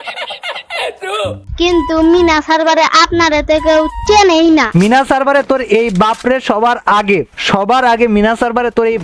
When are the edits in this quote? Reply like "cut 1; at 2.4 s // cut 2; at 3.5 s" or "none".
none

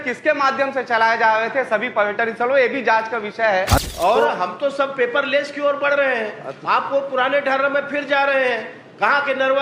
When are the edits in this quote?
cut 1; at 3.8 s

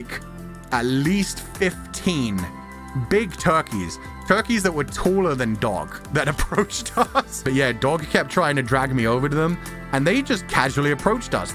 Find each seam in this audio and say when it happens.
cut 1; at 7.4 s

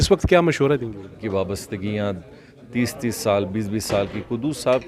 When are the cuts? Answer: cut 1; at 1.2 s

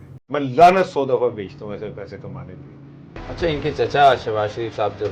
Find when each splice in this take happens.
cut 1; at 3.2 s

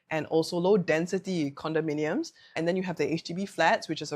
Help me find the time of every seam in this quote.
cut 1; at 2.6 s

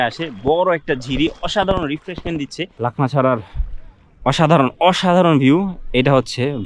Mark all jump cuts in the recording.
cut 1; at 2.7 s

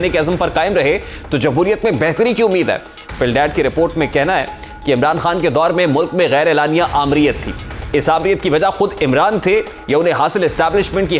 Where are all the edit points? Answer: none

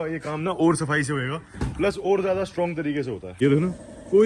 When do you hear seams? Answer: cut 1; at 3.3 s

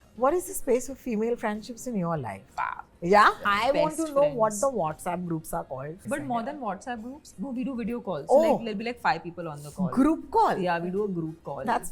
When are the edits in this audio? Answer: cut 1; at 2.4 s // cut 2; at 3.5 s // cut 3; at 6.0 s // cut 4; at 7.3 s

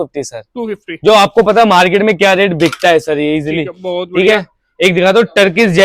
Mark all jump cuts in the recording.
none

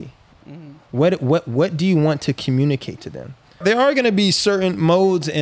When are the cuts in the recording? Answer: cut 1; at 3.6 s

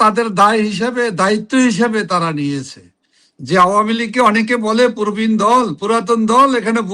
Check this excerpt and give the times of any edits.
none

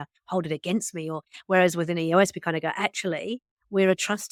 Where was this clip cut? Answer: none

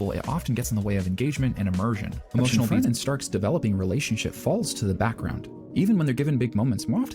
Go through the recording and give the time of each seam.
cut 1; at 2.4 s

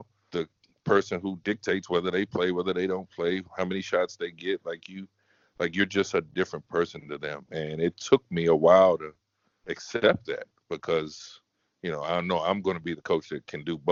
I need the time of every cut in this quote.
none

